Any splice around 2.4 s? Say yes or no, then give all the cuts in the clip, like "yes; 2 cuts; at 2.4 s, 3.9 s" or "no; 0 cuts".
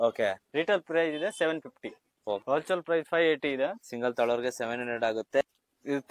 yes; 3 cuts; at 2.4 s, 3.9 s, 5.4 s